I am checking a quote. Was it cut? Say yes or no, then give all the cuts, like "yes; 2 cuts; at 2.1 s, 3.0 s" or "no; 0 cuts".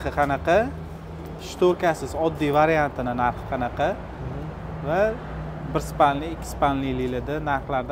no; 0 cuts